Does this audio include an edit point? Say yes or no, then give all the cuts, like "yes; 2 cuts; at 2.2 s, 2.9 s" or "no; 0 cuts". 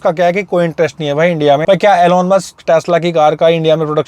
yes; 1 cut; at 1.6 s